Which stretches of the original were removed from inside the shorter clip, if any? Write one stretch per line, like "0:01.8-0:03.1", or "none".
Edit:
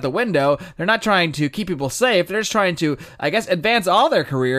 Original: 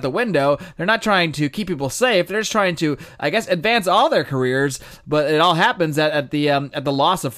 none